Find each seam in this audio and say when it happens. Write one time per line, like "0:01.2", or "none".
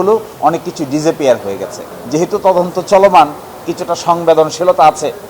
0:01.9